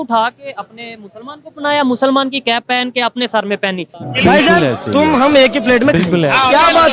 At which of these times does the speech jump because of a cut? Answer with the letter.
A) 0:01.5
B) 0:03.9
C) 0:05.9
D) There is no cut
B